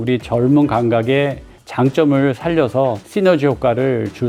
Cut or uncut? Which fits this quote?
uncut